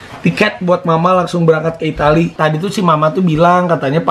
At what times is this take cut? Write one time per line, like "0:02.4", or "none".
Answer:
0:02.3